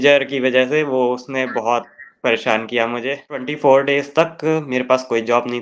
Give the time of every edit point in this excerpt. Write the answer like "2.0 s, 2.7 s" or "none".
3.5 s